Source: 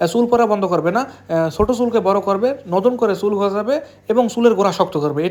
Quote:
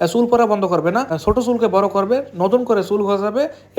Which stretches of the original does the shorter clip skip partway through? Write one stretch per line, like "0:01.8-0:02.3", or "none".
0:01.2-0:01.5